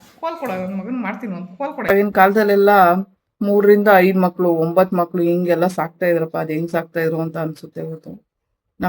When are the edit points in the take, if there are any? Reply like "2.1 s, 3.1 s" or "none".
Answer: 1.9 s